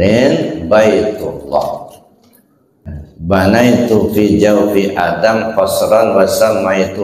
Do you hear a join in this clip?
yes; 1 cut; at 3.0 s

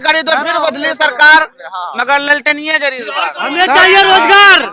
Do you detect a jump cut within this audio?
yes; 1 cut; at 3.4 s

